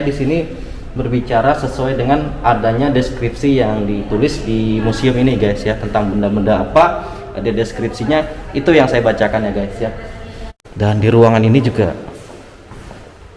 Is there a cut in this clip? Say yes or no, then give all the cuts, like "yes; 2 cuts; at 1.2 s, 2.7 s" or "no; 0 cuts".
yes; 1 cut; at 10.5 s